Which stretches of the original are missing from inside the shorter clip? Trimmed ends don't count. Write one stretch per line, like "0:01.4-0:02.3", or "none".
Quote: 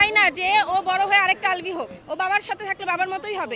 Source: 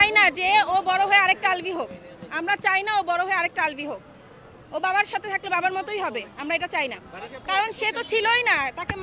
0:02.0-0:04.6